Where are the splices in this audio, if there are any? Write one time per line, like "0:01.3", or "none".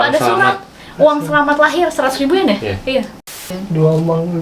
0:03.5